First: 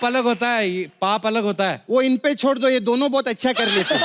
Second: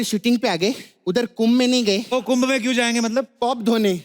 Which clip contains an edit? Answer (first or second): second